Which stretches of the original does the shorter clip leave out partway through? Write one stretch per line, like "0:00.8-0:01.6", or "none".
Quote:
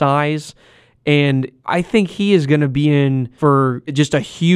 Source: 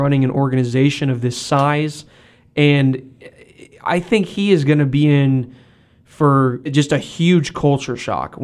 0:03.1-0:03.7
0:05.4-0:06.1